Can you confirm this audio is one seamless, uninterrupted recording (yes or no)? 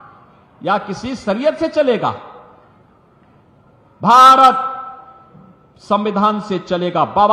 yes